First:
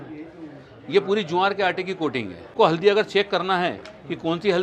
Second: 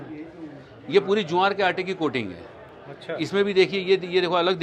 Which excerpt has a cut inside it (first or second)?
first